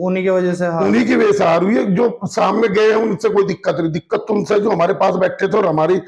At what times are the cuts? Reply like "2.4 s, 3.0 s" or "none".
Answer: none